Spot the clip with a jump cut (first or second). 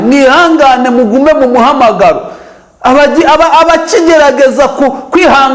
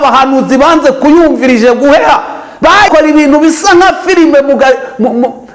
second